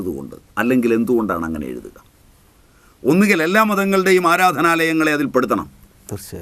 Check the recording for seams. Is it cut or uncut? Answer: uncut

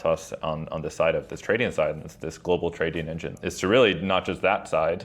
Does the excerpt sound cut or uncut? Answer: cut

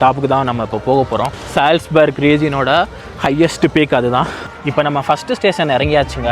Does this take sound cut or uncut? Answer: cut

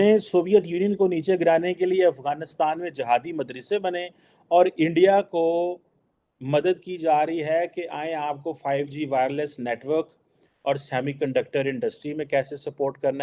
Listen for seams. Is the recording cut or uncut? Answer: uncut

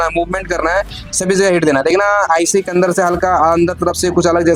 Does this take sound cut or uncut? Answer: uncut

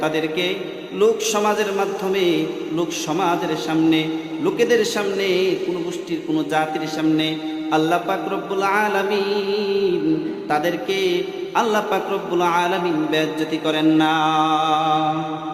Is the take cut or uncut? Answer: uncut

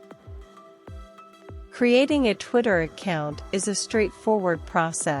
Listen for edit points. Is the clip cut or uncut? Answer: cut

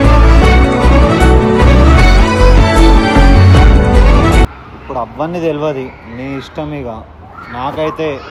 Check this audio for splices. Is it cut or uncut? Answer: uncut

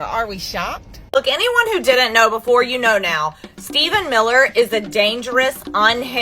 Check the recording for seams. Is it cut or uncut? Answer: cut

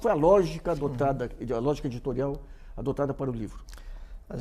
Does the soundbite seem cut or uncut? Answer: cut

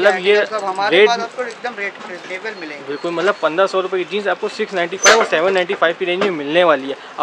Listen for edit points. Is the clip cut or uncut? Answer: uncut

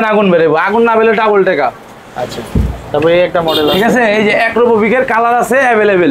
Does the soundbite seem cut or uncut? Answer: uncut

